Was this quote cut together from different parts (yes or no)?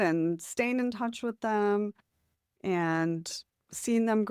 no